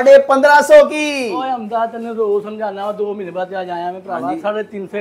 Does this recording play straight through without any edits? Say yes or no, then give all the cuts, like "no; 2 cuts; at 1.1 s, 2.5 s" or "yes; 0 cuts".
yes; 0 cuts